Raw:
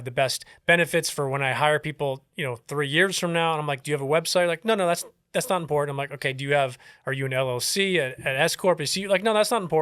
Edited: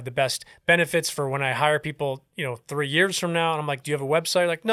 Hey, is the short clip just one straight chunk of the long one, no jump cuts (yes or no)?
yes